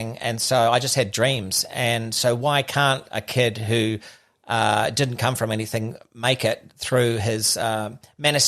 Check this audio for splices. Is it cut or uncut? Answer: uncut